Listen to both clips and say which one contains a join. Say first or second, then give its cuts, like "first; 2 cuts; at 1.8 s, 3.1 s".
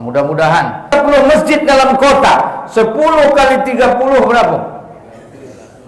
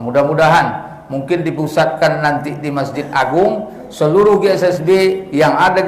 first; 1 cut; at 0.9 s